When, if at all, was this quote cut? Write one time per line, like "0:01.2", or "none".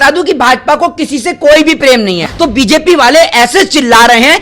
0:02.2

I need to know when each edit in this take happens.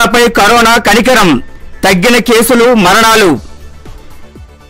none

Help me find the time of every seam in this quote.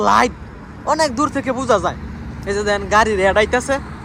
none

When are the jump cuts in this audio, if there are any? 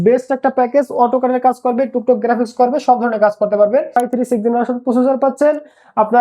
0:04.0

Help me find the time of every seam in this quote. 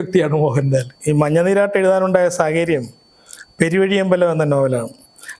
0:00.9

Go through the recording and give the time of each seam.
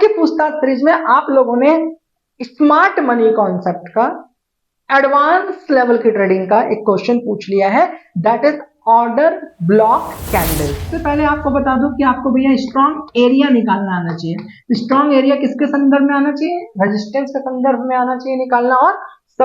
0:10.9

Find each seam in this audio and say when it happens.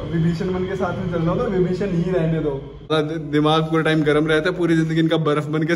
0:02.9

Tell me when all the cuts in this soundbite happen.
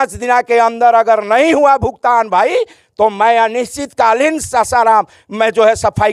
none

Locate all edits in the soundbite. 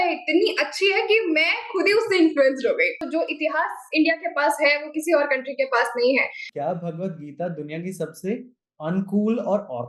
0:03.1
0:06.4

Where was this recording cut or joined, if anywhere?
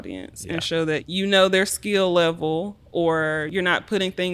0:01.1
0:03.5

